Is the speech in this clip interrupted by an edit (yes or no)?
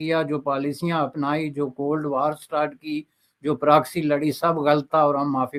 no